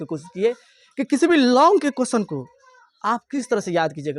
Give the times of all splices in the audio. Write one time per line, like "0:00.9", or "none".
0:03.2